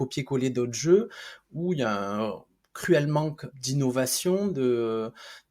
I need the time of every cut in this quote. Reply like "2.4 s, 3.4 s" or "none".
3.5 s